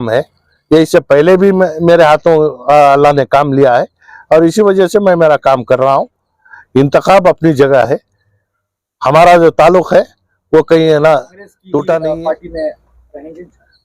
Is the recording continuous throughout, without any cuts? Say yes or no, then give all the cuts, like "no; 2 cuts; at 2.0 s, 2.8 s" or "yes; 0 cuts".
no; 1 cut; at 12.2 s